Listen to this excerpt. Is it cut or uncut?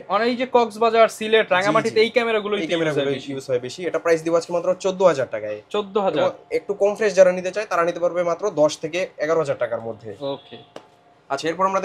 uncut